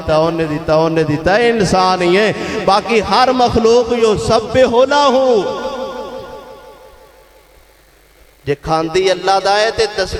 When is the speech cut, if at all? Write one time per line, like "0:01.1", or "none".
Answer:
none